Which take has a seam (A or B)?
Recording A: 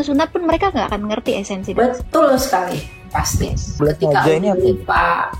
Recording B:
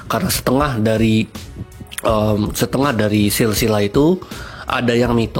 A